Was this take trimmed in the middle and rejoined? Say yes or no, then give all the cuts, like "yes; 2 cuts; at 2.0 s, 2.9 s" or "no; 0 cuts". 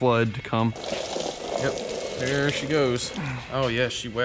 no; 0 cuts